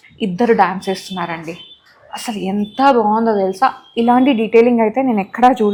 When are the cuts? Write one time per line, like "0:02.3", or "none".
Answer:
none